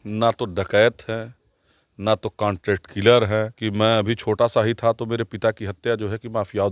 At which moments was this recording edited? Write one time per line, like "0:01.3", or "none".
0:03.6